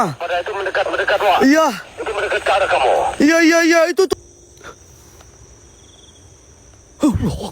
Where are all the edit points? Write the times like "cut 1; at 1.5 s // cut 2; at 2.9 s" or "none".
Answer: cut 1; at 4.1 s